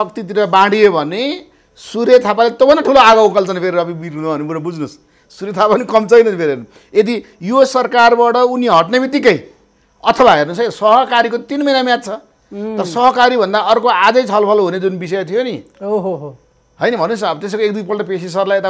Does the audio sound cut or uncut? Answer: uncut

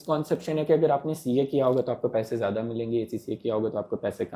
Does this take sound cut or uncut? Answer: uncut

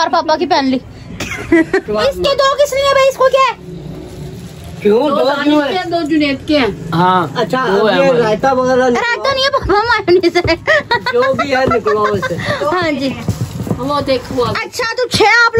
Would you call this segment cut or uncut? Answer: cut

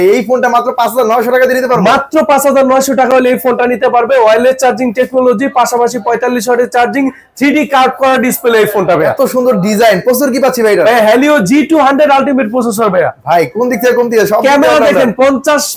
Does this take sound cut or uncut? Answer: uncut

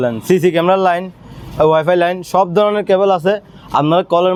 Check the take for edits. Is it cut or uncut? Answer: uncut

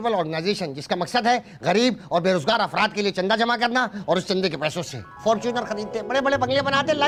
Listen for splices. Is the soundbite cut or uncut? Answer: uncut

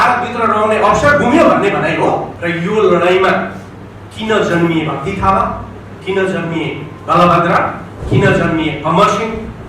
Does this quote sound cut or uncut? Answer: cut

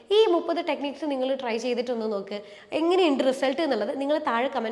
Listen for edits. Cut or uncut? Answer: uncut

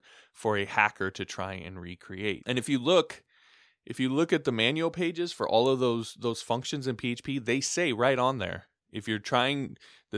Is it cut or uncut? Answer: cut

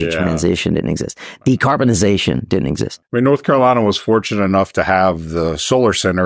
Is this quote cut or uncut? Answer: cut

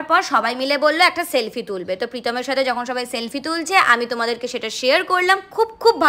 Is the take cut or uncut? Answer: uncut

